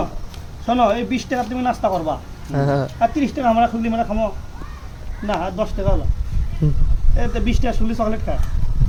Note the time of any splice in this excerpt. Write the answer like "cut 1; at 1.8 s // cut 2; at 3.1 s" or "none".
none